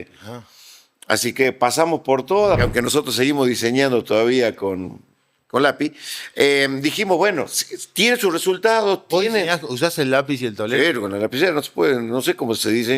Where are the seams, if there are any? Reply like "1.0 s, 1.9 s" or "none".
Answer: 2.6 s